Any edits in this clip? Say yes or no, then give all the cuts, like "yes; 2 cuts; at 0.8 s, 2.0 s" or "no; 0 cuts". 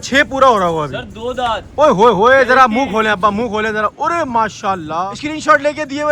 yes; 1 cut; at 5.1 s